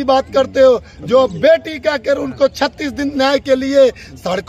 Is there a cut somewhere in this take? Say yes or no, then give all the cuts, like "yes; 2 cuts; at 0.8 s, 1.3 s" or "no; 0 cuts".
no; 0 cuts